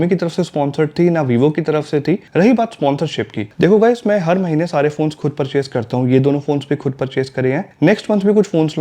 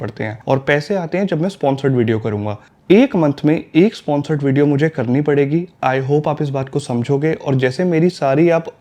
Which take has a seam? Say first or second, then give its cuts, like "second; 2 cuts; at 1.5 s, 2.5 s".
first; 1 cut; at 2.2 s